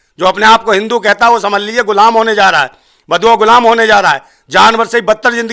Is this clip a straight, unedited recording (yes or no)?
yes